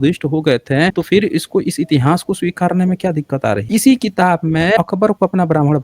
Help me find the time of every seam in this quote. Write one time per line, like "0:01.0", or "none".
0:01.0
0:03.6
0:04.8